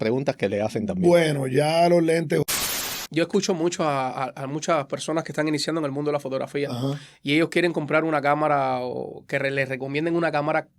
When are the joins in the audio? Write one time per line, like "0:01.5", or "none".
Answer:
0:02.4